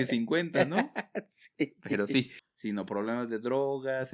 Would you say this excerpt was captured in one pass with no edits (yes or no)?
no